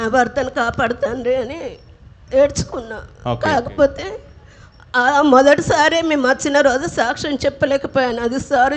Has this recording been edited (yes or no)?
no